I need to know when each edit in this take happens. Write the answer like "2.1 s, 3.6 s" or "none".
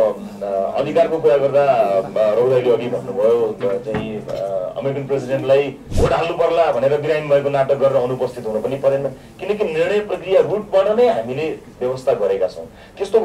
5.9 s